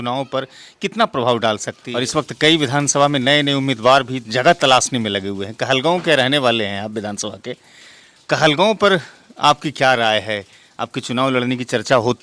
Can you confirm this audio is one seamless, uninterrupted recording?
no; 1 cut; at 1.8 s

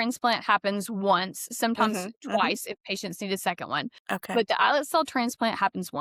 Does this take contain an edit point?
no; 0 cuts

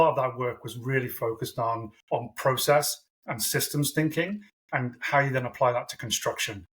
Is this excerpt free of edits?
no; 1 cut; at 1.9 s

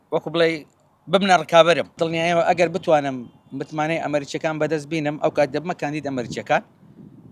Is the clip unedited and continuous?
no; 1 cut; at 2.0 s

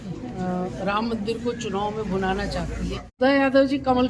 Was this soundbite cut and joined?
yes; 1 cut; at 3.2 s

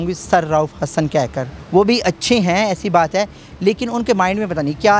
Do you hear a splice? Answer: yes; 1 cut; at 1.5 s

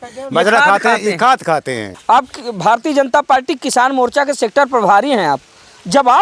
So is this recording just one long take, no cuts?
no; 1 cut; at 1.9 s

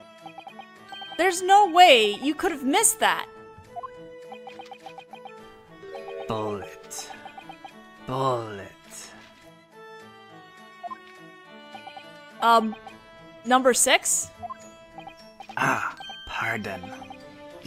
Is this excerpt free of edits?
yes; 0 cuts

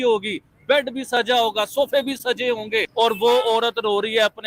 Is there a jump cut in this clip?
yes; 1 cut; at 2.9 s

